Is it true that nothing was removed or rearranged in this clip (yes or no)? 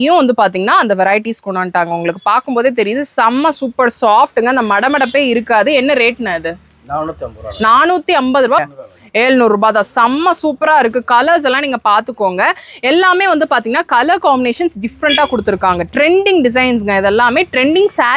no